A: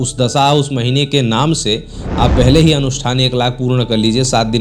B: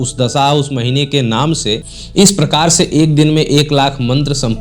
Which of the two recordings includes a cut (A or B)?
B